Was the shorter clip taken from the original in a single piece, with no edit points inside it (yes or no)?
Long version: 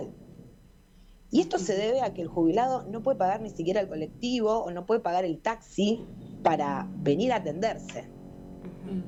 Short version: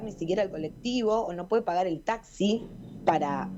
yes